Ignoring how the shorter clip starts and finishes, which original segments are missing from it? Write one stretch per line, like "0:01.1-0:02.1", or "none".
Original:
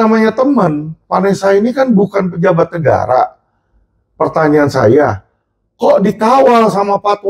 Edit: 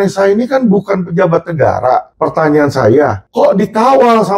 0:03.4-0:04.1
0:05.2-0:05.7